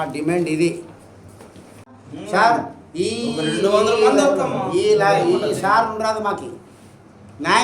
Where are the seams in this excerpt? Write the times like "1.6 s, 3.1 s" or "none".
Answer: 2.0 s